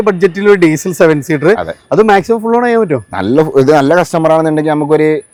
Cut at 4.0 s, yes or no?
no